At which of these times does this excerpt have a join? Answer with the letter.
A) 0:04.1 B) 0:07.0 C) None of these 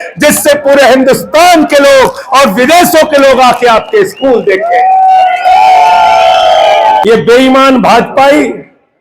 B